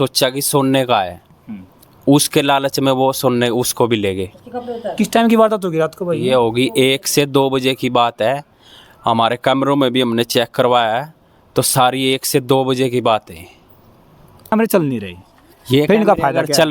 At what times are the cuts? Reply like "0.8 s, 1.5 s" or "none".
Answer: 14.5 s